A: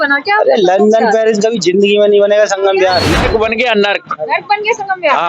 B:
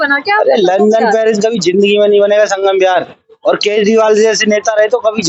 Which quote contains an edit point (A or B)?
A